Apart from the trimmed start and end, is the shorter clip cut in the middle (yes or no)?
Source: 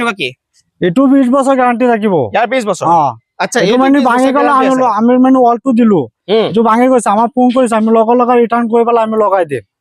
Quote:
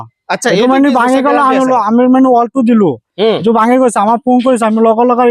no